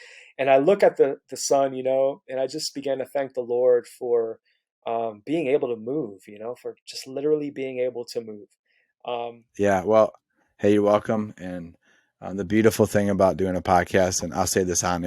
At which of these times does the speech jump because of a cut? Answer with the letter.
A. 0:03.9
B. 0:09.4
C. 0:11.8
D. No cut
B